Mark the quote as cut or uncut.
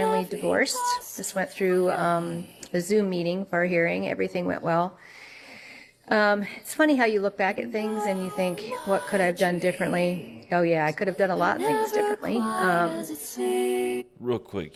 uncut